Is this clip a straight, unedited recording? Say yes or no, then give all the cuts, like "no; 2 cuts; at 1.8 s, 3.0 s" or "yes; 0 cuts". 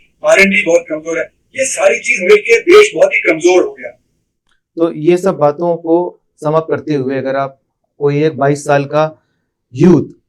yes; 0 cuts